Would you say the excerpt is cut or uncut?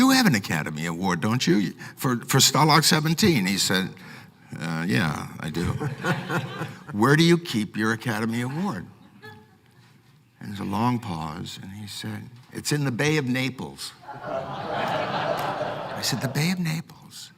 cut